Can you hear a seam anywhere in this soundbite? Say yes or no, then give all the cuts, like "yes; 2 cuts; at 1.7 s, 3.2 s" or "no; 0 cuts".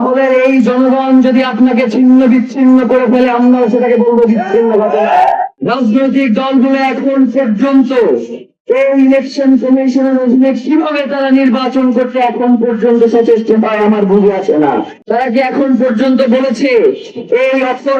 no; 0 cuts